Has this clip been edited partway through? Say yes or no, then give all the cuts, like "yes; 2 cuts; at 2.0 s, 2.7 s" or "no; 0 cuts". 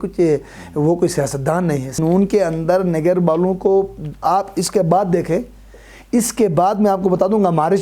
yes; 1 cut; at 2.0 s